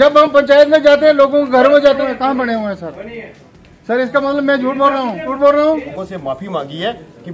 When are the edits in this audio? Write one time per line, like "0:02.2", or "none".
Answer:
0:02.0
0:05.3
0:05.9